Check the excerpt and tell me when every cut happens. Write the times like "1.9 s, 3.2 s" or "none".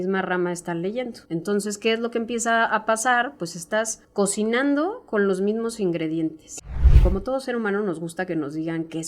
1.2 s, 4.0 s, 6.9 s